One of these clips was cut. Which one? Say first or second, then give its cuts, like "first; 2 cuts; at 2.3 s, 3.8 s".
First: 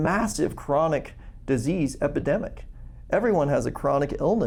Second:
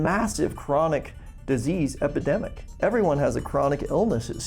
second; 1 cut; at 2.6 s